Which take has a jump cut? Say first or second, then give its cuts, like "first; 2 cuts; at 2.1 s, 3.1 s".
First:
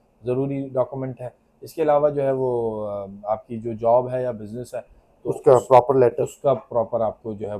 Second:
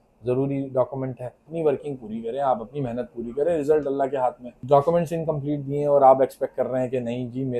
second; 2 cuts; at 1.5 s, 4.5 s